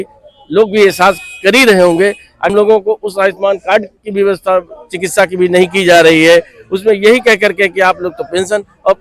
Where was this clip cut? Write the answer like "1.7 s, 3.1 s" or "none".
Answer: 2.5 s

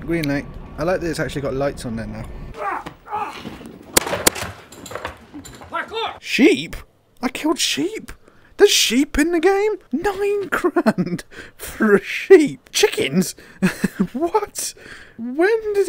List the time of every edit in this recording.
6.2 s, 9.8 s

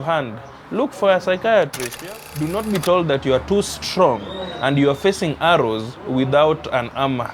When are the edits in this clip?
1.9 s

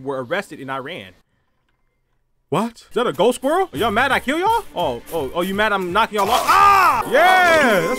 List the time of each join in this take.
2.8 s, 3.7 s, 4.7 s, 7.0 s

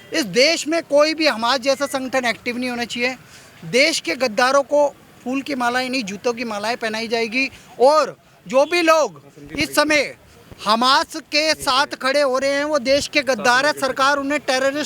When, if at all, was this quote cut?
none

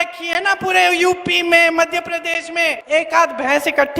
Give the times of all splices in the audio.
2.8 s

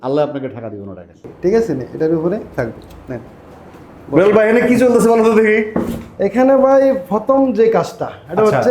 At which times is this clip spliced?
1.3 s

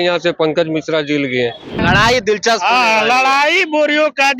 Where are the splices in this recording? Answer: 1.8 s

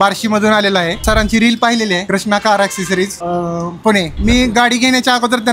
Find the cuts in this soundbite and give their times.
1.0 s, 2.0 s, 3.2 s, 4.1 s

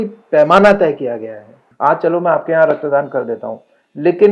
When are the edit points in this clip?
1.6 s

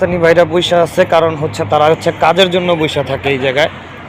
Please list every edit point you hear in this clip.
none

